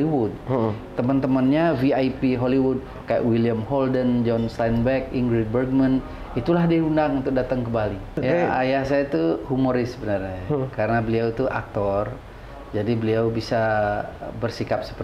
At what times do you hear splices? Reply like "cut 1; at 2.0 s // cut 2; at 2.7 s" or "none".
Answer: cut 1; at 8.2 s